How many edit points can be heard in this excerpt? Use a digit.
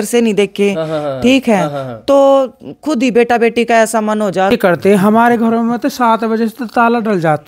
1